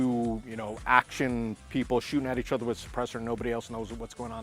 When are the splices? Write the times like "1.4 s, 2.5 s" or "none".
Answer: none